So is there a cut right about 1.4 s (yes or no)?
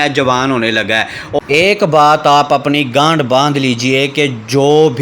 yes